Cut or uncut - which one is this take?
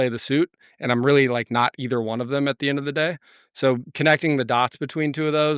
uncut